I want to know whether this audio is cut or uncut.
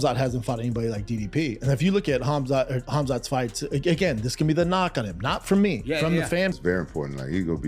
cut